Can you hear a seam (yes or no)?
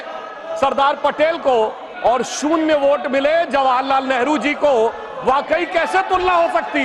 no